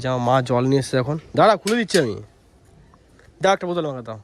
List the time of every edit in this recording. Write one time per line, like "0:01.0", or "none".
none